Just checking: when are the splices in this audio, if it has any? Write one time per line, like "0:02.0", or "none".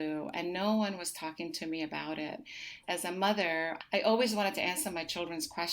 0:02.8
0:03.8